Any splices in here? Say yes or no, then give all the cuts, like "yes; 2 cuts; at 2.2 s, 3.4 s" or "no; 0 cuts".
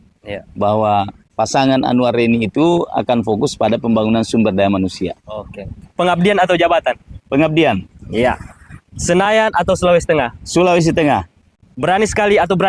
yes; 1 cut; at 5.8 s